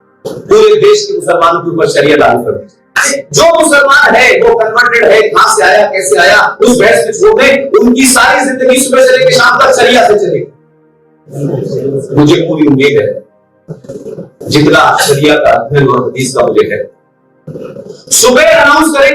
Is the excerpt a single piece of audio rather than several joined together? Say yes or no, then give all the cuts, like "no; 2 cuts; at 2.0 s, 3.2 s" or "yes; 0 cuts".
no; 2 cuts; at 3.1 s, 11.3 s